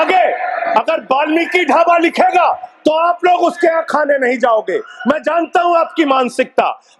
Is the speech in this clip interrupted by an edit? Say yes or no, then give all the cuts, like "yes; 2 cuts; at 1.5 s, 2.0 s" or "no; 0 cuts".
no; 0 cuts